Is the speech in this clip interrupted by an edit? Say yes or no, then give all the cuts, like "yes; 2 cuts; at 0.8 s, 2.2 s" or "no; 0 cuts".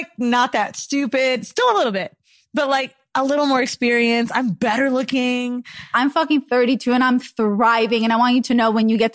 yes; 1 cut; at 5.9 s